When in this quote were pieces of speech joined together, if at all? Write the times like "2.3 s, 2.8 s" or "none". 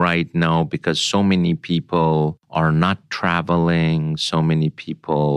2.4 s